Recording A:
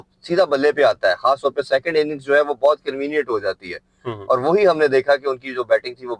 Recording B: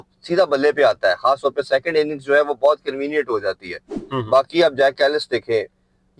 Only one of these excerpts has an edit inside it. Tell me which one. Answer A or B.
B